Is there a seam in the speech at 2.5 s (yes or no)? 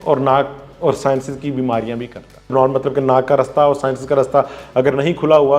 yes